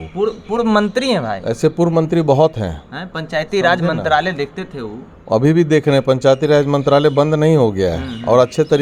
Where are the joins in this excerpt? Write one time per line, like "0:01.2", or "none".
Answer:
none

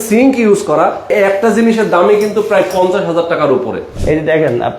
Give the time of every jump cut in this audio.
0:01.1
0:03.9

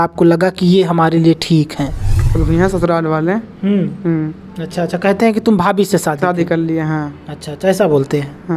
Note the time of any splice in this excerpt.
0:02.4

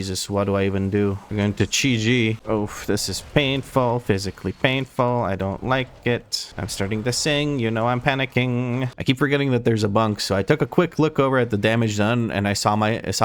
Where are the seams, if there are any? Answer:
0:02.4
0:08.9

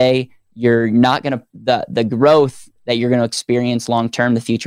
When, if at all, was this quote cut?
none

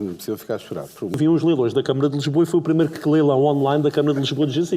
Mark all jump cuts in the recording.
0:01.2

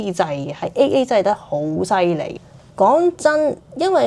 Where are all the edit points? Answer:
none

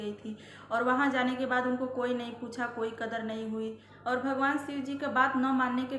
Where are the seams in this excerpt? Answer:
0:04.0

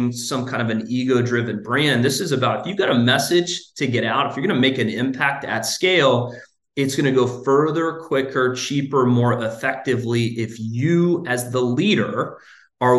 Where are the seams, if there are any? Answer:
none

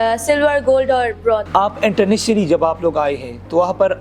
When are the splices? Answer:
0:01.5

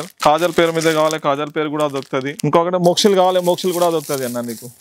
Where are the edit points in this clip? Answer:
none

